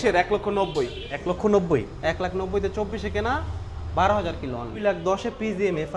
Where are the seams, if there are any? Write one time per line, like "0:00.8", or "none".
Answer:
0:01.1
0:04.8